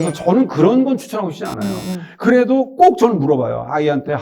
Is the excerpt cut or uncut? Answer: uncut